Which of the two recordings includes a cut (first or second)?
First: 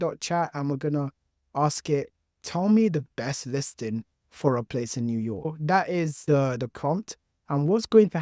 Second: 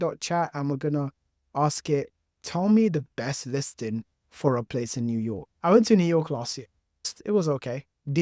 second